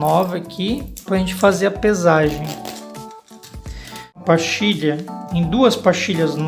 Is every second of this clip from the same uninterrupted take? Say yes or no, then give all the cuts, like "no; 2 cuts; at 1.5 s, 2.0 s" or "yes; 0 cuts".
no; 1 cut; at 4.2 s